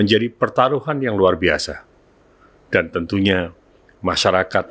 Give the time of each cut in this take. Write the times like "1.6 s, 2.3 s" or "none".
none